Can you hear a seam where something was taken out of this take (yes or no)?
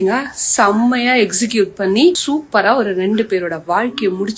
yes